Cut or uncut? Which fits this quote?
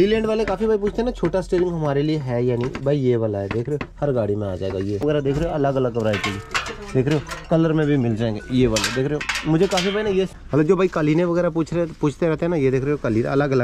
cut